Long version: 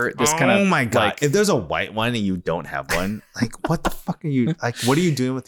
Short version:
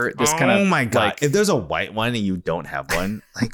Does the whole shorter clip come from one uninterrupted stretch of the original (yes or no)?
yes